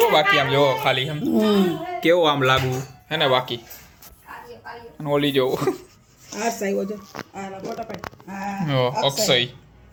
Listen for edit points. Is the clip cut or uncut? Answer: uncut